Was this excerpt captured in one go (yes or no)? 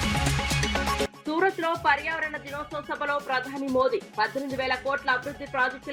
no